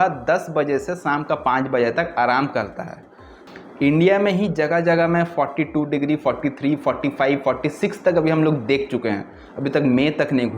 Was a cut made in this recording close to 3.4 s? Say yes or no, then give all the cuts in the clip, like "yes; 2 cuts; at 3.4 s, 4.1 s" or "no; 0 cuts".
yes; 1 cut; at 3.4 s